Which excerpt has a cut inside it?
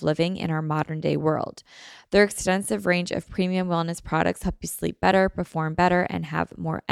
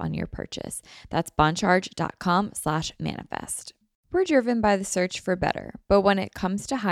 second; 1 cut; at 4.0 s

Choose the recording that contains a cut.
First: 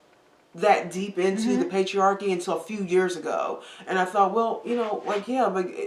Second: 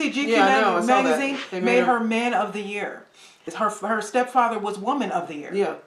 second; 1 cut; at 3.4 s

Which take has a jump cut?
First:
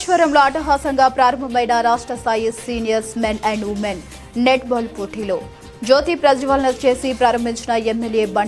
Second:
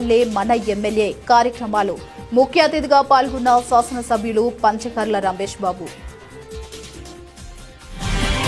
second; 1 cut; at 5.9 s

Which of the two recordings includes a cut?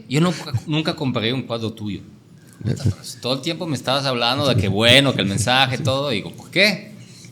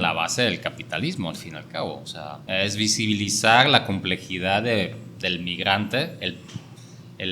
second; 1 cut; at 2.4 s

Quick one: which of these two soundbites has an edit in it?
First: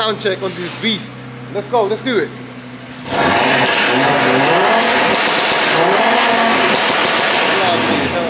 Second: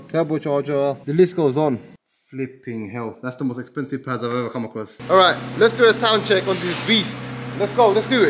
second; 3 cuts; at 1.0 s, 2.0 s, 4.9 s

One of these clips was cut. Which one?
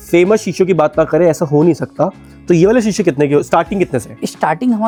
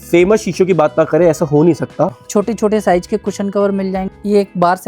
second; 2 cuts; at 2.2 s, 4.1 s

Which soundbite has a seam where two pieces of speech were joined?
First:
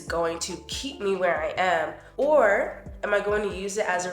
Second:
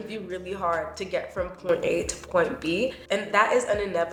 first; 1 cut; at 2.0 s

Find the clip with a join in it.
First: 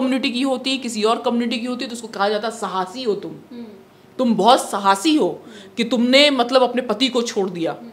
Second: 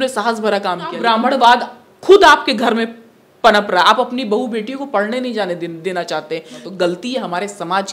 second; 2 cuts; at 1.0 s, 6.6 s

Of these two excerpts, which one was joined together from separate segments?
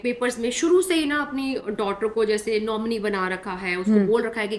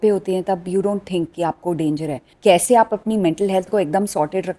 second; 1 cut; at 2.2 s

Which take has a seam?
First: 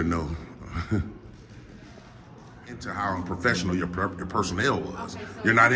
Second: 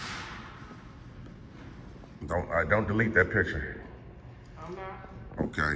first; 1 cut; at 2.9 s

